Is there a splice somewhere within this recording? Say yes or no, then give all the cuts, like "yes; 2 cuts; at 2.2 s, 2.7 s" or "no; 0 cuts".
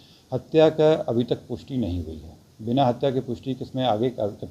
no; 0 cuts